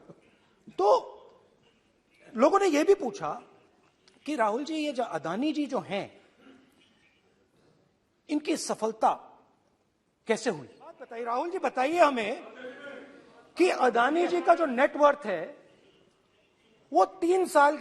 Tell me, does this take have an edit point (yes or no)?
yes